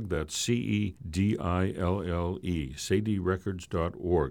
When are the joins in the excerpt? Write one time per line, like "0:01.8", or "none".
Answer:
0:01.0